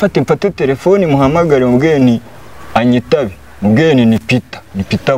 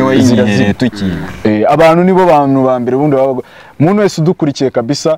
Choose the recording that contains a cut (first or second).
second